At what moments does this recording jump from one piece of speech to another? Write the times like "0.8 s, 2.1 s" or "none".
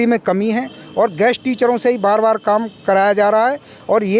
none